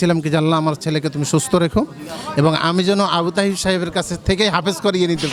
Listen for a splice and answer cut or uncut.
uncut